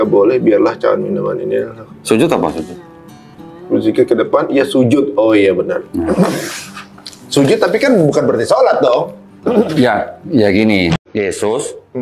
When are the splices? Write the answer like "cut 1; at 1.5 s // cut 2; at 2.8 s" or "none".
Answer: cut 1; at 11.0 s